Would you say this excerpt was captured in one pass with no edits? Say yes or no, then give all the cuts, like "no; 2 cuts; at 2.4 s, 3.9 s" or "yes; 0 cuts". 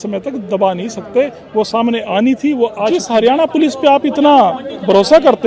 no; 1 cut; at 3.0 s